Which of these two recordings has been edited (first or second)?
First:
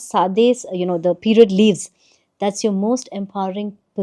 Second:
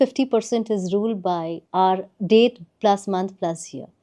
second